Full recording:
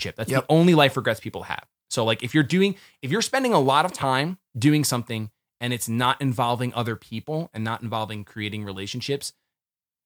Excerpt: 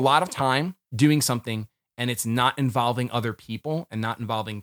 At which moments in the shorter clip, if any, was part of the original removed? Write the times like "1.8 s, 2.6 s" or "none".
none